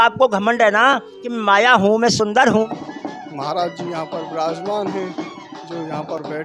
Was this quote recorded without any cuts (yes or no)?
no